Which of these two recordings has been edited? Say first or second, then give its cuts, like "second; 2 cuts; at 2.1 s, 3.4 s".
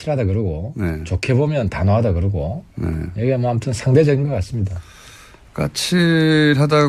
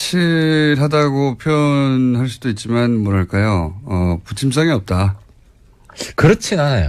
first; 1 cut; at 3.3 s